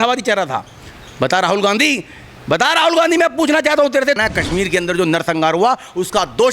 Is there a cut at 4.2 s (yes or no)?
yes